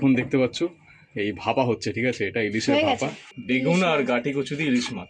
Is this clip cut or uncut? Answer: cut